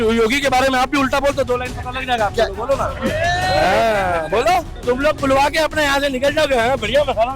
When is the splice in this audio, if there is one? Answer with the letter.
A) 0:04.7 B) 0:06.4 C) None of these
A